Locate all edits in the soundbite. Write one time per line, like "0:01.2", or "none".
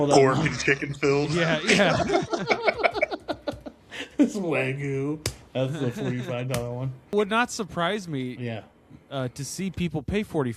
0:07.1